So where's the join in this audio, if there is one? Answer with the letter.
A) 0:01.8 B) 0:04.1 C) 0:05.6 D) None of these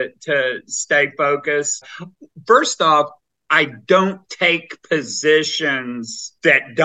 A